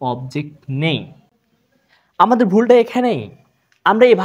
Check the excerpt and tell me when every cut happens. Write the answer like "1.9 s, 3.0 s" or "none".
none